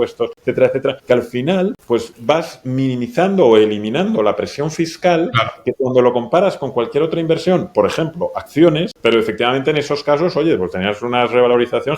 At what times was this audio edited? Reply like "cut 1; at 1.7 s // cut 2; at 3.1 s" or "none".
cut 1; at 8.9 s

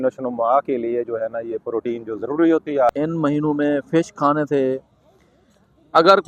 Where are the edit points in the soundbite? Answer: cut 1; at 3.0 s

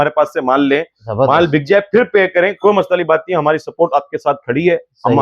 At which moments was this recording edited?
none

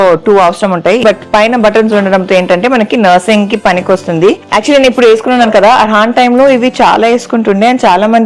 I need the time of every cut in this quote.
cut 1; at 1.0 s // cut 2; at 4.4 s

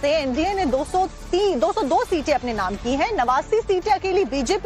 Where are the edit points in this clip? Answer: cut 1; at 2.0 s

